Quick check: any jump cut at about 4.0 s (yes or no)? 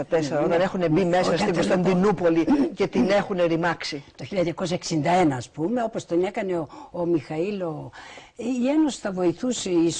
no